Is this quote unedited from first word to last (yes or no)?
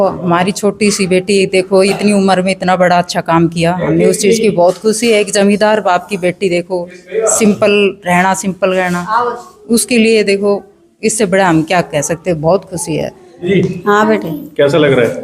no